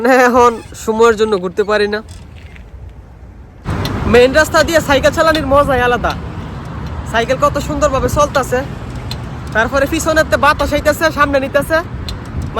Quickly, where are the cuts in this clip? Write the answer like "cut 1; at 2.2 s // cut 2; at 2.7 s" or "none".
cut 1; at 3.6 s